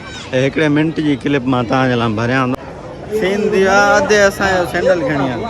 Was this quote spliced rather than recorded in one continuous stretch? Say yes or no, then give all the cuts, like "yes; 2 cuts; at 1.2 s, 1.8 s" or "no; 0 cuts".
yes; 1 cut; at 2.5 s